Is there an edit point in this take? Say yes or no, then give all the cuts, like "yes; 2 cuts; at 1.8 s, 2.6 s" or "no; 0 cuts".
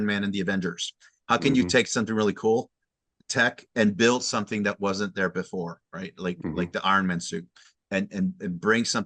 no; 0 cuts